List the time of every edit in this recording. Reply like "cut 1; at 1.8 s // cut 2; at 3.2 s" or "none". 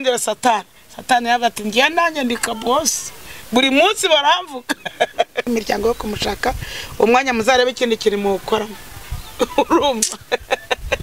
cut 1; at 5.5 s